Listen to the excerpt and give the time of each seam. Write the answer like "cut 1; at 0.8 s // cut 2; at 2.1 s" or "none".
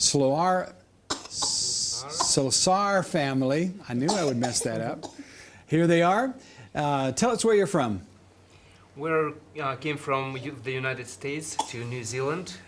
cut 1; at 8.1 s